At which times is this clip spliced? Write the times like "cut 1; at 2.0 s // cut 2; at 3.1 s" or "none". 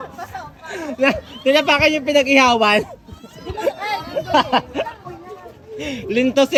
none